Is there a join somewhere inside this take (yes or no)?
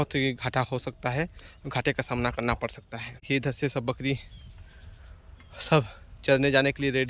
yes